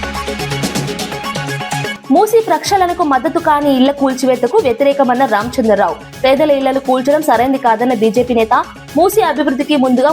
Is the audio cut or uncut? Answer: cut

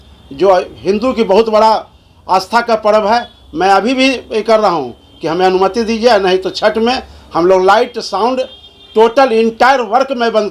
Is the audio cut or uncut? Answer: uncut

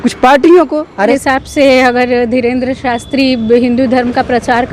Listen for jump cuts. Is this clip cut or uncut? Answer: cut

